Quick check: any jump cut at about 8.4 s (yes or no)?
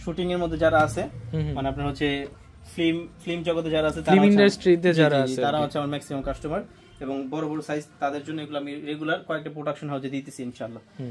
no